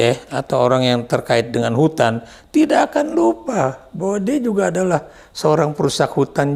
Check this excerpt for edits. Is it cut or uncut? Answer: uncut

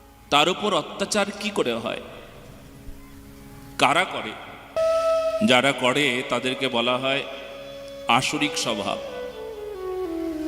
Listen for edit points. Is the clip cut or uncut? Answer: cut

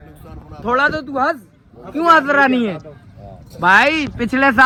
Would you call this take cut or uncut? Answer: uncut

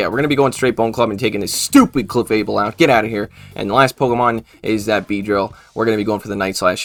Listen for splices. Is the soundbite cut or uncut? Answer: uncut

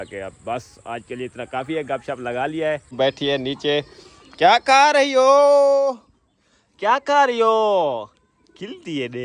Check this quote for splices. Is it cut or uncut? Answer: cut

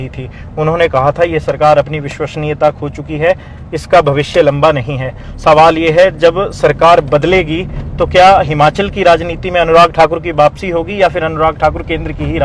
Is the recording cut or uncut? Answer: uncut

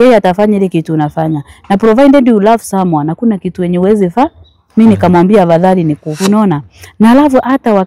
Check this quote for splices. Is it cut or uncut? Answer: cut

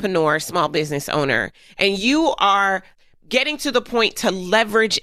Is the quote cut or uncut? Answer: cut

